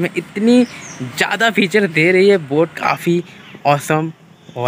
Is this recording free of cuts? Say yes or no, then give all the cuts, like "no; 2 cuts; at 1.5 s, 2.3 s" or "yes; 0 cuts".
no; 1 cut; at 2.8 s